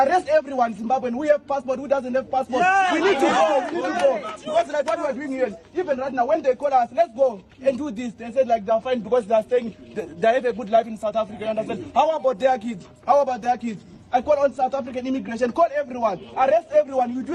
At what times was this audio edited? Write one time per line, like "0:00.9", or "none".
none